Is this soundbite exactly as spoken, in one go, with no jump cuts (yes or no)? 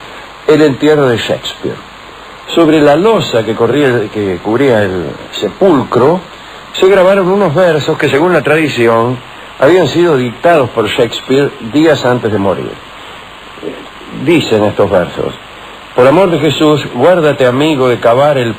no